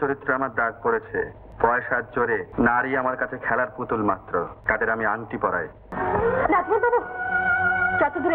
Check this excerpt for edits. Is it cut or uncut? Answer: cut